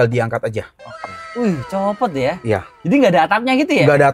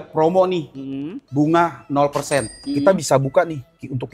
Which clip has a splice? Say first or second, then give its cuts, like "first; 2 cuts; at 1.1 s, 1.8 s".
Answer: second; 1 cut; at 2.6 s